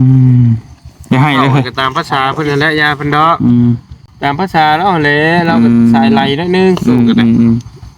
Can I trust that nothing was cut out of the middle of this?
no; 1 cut; at 4.1 s

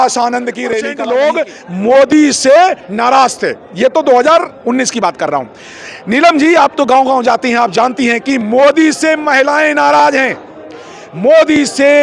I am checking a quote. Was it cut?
yes; 1 cut; at 0.9 s

